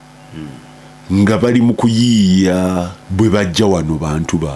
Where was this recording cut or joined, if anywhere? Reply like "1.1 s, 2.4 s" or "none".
3.0 s